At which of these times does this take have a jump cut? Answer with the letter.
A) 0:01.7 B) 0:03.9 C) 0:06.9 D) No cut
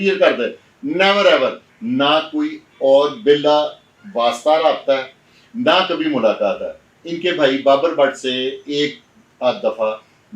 A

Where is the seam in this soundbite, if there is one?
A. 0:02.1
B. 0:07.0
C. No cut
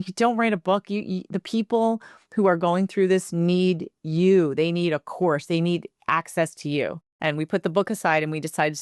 B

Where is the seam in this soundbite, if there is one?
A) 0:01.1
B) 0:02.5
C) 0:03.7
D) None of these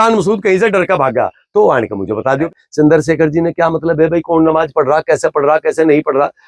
B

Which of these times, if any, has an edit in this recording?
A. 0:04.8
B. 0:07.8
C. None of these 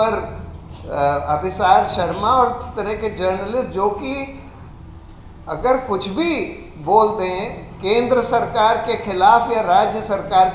C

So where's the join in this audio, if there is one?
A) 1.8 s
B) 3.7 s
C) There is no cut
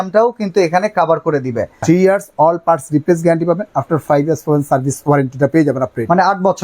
A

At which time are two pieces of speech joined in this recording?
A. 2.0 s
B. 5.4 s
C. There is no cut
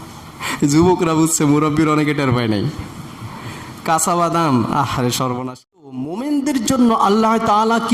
B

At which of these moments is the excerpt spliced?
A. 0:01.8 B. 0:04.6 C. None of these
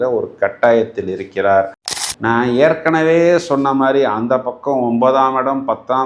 A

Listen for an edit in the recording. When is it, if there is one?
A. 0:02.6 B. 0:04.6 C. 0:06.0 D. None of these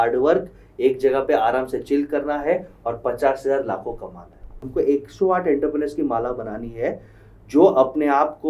B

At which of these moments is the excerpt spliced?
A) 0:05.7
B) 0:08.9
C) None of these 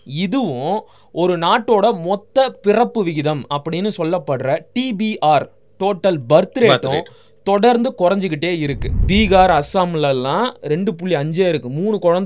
B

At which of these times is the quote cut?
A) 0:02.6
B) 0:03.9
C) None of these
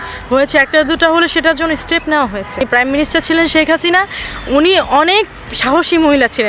A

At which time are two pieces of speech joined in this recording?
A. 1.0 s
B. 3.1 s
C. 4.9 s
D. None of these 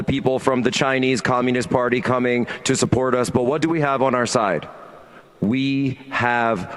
D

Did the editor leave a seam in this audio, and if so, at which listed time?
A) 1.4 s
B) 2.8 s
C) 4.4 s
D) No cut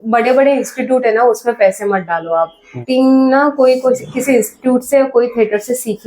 B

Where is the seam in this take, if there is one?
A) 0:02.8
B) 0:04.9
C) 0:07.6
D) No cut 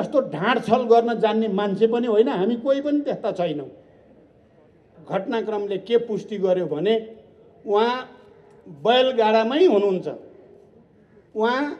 B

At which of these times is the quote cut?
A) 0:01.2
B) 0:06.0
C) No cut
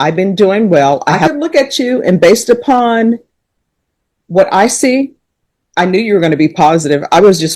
A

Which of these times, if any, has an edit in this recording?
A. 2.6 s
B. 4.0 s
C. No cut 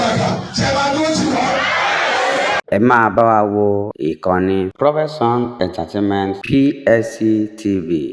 A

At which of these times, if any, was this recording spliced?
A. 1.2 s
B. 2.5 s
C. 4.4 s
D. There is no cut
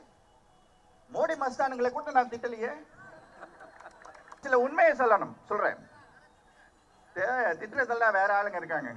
C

